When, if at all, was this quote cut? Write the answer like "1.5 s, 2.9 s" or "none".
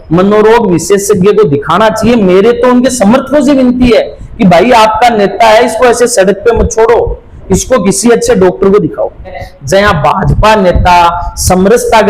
9.5 s